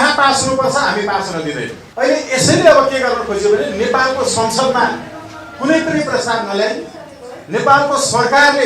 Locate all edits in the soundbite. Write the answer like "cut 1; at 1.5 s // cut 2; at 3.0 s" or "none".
cut 1; at 1.8 s